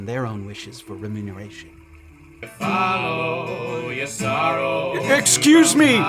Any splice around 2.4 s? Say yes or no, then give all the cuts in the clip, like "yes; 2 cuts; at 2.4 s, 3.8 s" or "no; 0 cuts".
yes; 1 cut; at 2.4 s